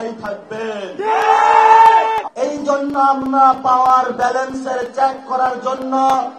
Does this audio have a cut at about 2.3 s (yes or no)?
yes